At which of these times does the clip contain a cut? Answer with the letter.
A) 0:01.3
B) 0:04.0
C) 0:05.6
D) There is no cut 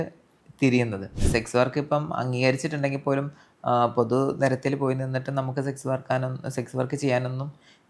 A